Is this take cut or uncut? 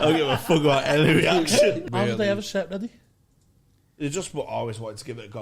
cut